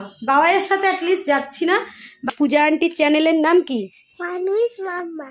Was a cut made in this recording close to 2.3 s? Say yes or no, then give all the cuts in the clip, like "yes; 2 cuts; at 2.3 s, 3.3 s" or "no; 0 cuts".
yes; 1 cut; at 2.3 s